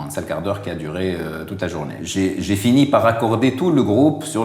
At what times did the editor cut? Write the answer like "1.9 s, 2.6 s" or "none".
2.0 s